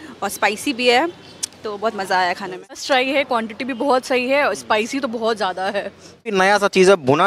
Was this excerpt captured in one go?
no; 2 cuts; at 2.7 s, 6.3 s

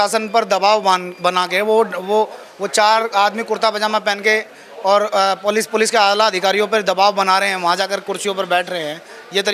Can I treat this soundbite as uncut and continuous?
yes; 0 cuts

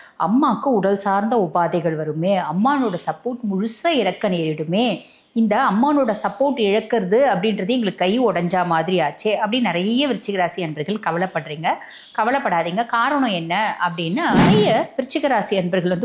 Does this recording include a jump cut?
yes; 1 cut; at 14.4 s

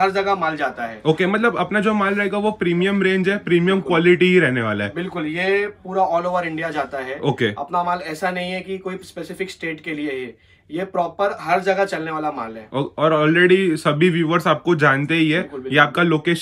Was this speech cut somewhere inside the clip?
no; 0 cuts

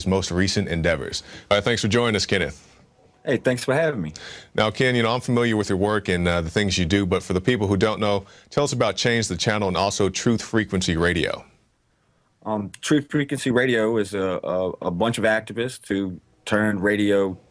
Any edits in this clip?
no; 0 cuts

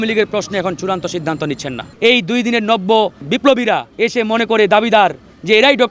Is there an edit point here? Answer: yes; 2 cuts; at 1.9 s, 3.4 s

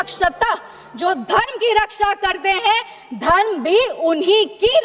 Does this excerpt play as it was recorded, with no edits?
yes; 0 cuts

